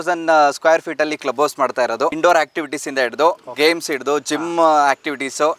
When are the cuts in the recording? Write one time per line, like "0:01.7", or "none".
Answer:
0:02.2